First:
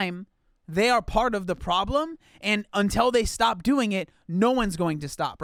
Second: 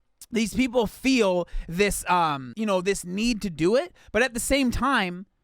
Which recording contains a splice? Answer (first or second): second